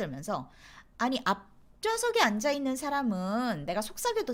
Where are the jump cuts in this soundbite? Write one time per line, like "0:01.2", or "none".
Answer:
none